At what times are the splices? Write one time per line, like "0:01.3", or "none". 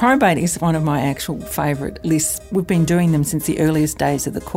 0:02.3